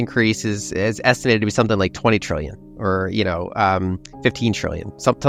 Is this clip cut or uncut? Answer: uncut